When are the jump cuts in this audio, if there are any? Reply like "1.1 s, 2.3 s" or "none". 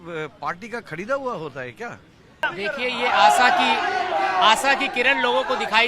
2.4 s